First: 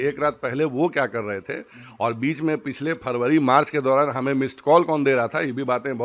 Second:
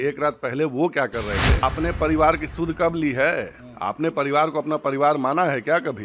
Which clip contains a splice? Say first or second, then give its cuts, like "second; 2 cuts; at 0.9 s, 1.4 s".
second; 1 cut; at 1.6 s